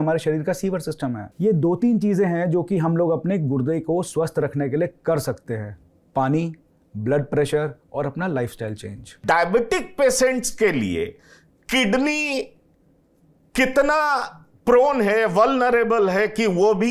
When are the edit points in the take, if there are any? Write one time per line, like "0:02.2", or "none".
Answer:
0:01.3
0:09.2